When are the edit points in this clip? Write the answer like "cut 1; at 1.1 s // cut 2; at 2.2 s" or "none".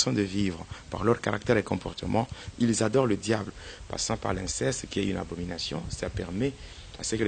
cut 1; at 3.6 s

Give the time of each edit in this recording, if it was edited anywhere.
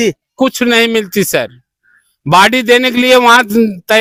none

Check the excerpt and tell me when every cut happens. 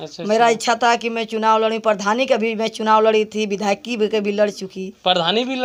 none

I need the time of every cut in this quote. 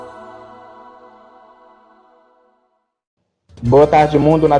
cut 1; at 3.4 s

